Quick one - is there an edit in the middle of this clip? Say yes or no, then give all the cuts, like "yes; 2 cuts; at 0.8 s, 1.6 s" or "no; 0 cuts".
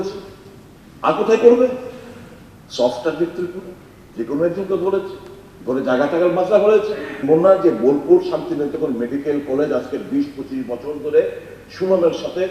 yes; 1 cut; at 7.1 s